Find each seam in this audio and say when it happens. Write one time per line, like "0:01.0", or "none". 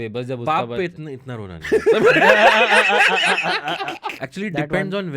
0:04.1